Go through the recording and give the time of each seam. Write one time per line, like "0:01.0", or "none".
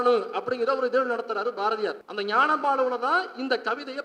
0:02.1